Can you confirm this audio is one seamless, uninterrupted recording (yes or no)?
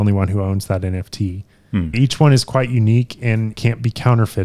no